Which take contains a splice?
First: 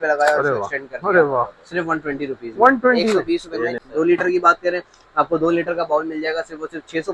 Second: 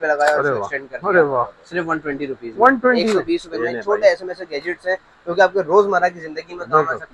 first; 1 cut; at 3.8 s

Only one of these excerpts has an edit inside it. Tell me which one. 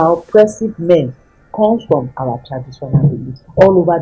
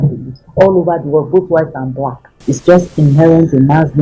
second; 1 cut; at 2.4 s

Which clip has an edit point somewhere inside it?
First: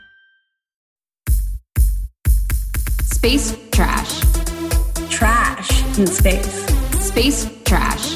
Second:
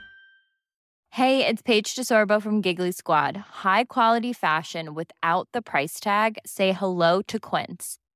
first; 1 cut; at 1.0 s

